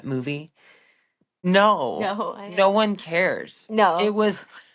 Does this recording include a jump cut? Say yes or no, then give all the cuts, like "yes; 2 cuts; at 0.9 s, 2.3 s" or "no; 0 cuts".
yes; 1 cut; at 1.2 s